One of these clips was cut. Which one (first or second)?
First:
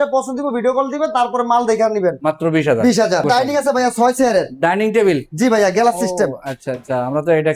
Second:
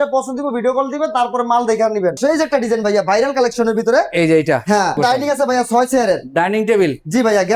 second